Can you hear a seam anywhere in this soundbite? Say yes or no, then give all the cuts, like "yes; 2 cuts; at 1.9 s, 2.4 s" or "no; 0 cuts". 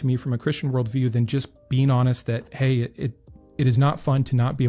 yes; 1 cut; at 2.5 s